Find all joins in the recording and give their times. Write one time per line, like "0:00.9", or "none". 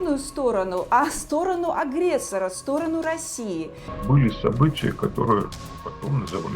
0:03.9